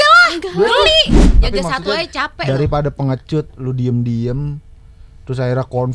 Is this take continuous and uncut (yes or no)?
no